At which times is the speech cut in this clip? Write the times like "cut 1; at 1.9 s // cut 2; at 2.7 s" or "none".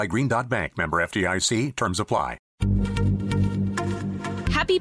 cut 1; at 2.4 s